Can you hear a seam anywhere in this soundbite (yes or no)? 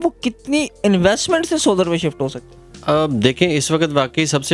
no